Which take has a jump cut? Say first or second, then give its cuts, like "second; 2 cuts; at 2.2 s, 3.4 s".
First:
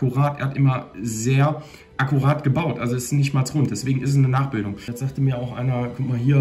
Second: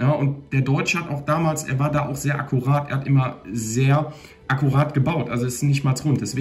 first; 1 cut; at 4.9 s